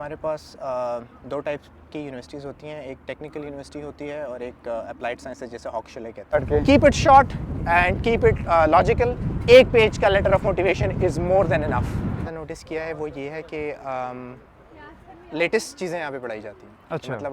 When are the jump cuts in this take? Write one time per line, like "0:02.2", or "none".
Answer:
0:06.4
0:12.2